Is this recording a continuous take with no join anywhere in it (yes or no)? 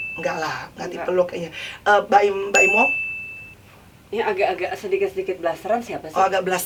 yes